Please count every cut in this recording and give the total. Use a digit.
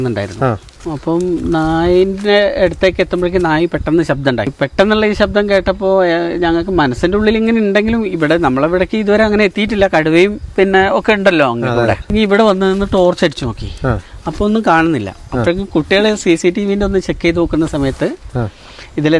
2